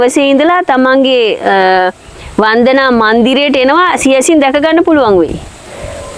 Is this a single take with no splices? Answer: yes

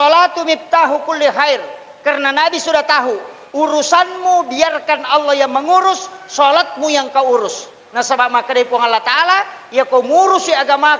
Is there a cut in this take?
no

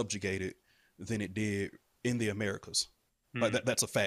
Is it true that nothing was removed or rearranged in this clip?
no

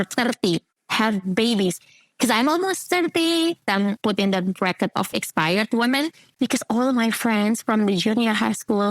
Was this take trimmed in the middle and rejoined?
yes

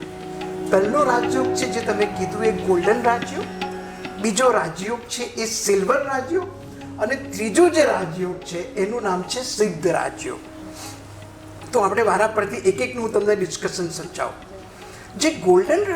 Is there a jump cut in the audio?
no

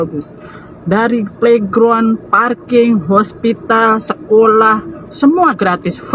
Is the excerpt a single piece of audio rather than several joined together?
yes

